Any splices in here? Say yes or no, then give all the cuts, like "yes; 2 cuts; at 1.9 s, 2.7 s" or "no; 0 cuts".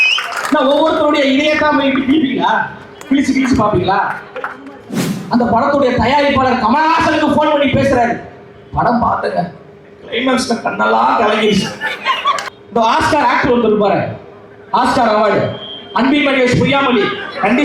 yes; 2 cuts; at 5.1 s, 12.5 s